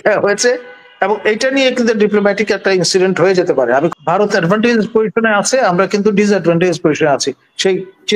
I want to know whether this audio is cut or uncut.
cut